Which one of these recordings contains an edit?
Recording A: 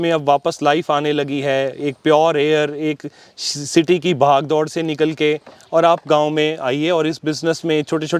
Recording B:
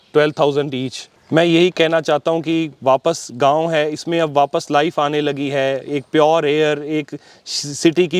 B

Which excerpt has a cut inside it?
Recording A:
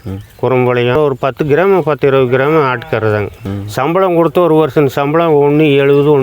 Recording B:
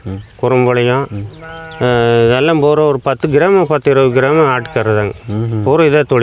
A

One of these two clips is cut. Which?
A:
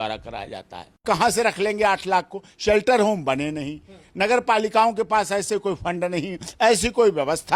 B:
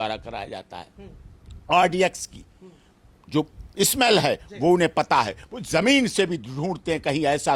A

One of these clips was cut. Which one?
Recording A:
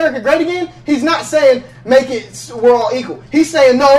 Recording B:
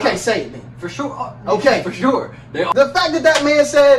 B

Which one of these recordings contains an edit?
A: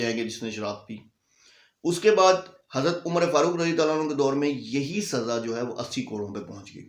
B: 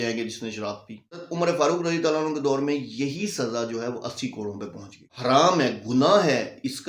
B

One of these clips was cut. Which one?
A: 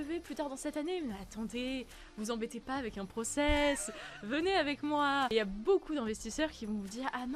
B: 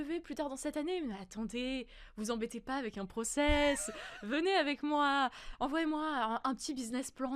A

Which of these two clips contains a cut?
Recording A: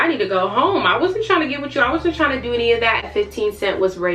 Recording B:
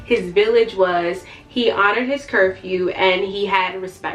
A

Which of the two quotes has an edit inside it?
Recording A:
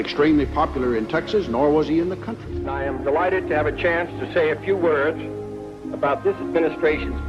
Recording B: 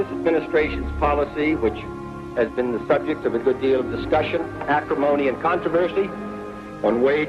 B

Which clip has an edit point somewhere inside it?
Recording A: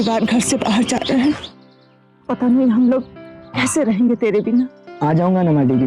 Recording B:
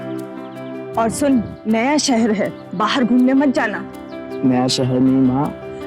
B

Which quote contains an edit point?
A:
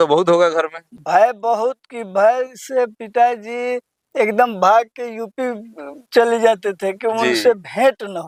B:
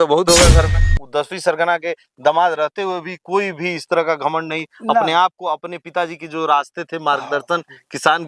B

